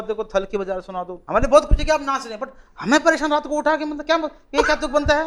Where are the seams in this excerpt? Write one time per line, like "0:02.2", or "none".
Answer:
0:01.1